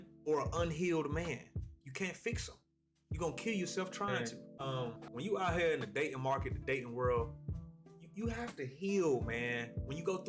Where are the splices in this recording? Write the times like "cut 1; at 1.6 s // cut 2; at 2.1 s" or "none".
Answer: cut 1; at 5.0 s